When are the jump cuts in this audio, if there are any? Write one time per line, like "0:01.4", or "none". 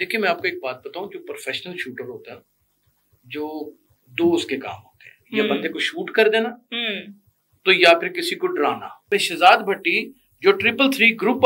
0:09.0

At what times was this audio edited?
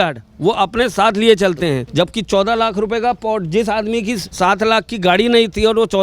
0:01.8
0:04.3

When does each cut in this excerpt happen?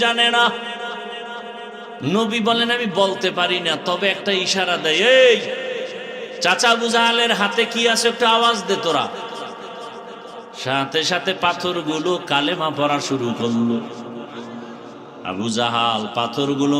0:02.0

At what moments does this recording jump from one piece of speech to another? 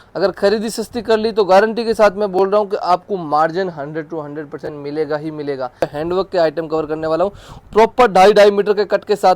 0:05.8

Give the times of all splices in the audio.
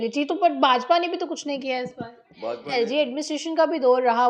0:02.6

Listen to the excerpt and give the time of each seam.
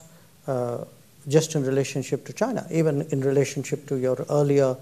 none

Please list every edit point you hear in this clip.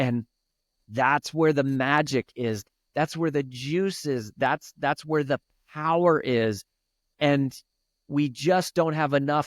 0:02.6

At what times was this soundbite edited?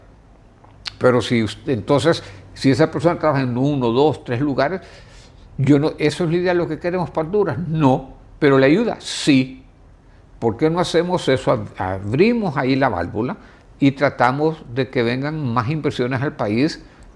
none

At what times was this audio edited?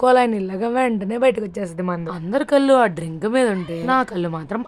0:02.1
0:03.8

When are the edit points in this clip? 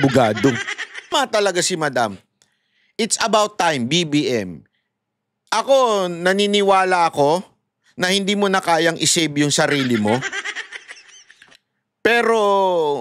0:01.1

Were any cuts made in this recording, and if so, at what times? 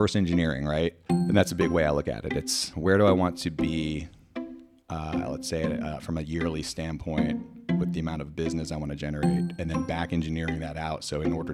0:01.1
0:02.7

